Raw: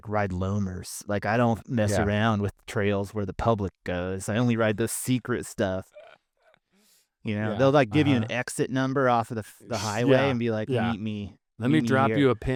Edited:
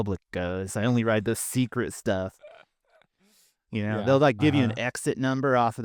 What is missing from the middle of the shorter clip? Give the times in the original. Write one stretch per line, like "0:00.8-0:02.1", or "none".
none